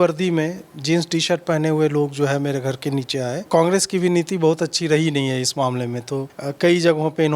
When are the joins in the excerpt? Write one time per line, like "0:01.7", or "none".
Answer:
0:03.4
0:06.4